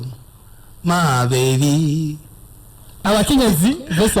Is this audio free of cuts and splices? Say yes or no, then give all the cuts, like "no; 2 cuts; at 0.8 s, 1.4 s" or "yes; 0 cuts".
no; 1 cut; at 3.0 s